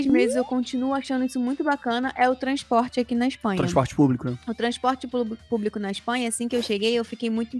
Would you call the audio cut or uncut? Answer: uncut